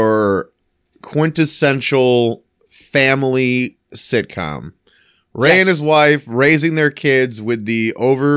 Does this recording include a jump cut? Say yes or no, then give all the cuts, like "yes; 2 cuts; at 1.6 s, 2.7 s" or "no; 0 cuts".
no; 0 cuts